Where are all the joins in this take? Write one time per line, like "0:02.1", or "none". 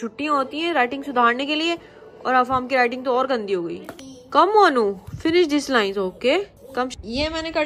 none